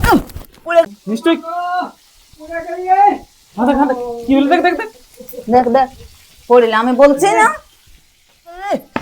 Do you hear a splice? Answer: no; 0 cuts

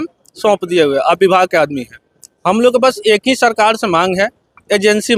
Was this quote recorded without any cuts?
yes; 0 cuts

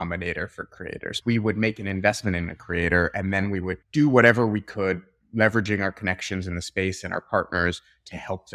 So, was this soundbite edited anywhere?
yes; 1 cut; at 1.2 s

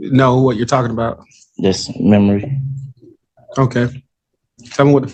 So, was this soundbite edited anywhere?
no; 0 cuts

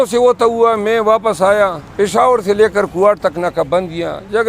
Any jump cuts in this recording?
yes; 1 cut; at 1.8 s

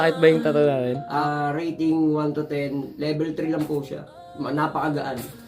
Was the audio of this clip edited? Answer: yes; 1 cut; at 1.1 s

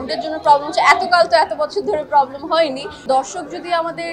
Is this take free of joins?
no; 1 cut; at 2.9 s

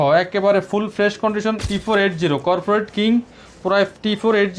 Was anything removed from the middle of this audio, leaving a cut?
yes; 1 cut; at 1.6 s

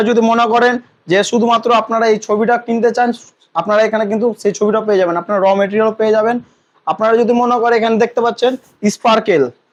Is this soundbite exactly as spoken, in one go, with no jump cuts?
yes; 0 cuts

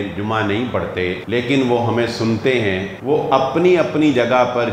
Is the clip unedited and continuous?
no; 2 cuts; at 1.2 s, 2.9 s

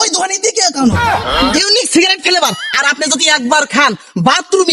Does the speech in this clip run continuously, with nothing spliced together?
no; 1 cut; at 1.5 s

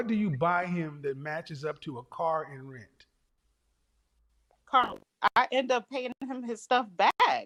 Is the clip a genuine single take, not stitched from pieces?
yes; 0 cuts

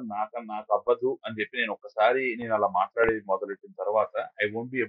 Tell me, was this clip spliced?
no; 0 cuts

